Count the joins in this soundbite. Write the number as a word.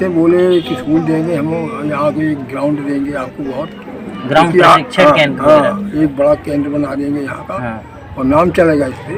zero